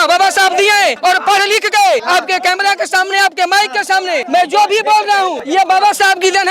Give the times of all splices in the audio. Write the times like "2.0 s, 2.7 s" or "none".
1.0 s, 2.0 s, 4.2 s, 5.4 s